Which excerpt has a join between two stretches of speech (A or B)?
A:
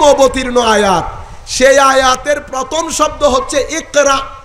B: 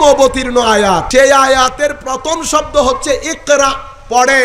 B